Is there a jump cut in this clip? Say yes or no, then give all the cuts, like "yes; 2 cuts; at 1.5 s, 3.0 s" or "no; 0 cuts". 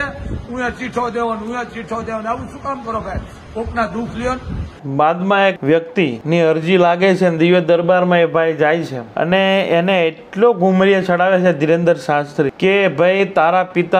no; 0 cuts